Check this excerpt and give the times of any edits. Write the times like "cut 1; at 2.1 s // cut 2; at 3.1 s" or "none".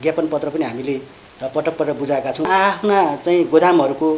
cut 1; at 2.5 s